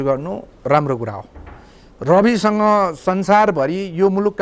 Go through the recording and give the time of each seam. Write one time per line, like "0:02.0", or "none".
none